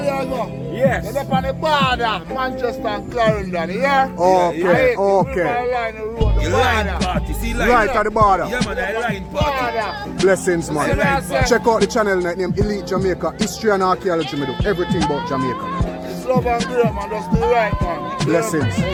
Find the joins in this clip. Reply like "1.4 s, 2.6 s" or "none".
none